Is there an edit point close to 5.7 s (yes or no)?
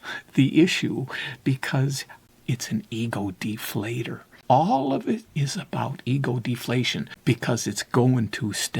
no